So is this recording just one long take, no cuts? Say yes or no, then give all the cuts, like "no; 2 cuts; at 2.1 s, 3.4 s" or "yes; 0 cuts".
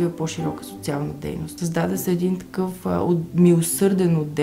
no; 1 cut; at 1.6 s